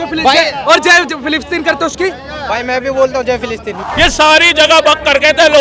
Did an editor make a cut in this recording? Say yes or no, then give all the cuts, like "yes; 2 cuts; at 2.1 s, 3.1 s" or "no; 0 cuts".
yes; 1 cut; at 3.8 s